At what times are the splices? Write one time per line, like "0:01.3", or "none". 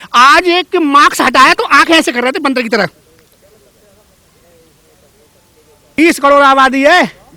0:06.0